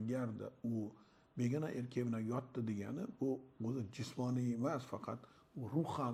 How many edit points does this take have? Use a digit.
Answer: 0